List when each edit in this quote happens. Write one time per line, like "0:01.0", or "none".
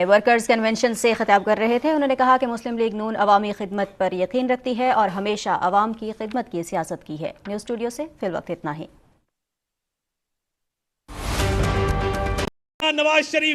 0:12.6